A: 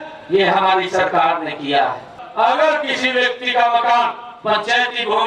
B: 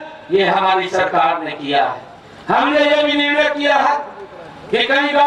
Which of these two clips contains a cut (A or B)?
A